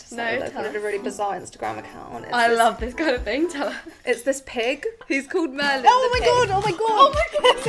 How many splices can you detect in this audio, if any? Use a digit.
1